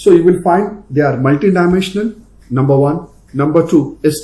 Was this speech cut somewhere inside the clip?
no; 0 cuts

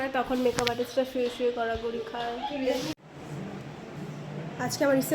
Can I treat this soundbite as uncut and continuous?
no; 1 cut; at 2.9 s

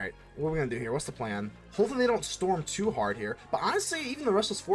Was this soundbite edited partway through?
yes; 1 cut; at 1.6 s

